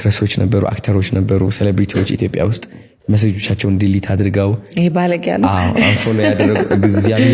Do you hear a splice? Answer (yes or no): no